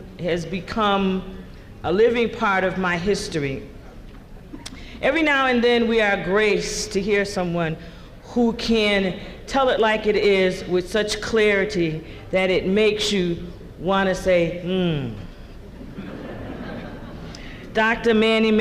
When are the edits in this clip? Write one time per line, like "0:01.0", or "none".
none